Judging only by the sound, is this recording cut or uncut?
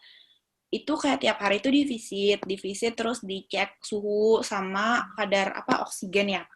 uncut